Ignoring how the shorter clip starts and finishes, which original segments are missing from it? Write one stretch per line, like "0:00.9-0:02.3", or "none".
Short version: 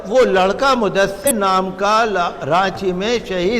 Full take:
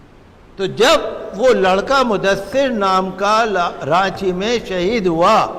0:02.5-0:02.7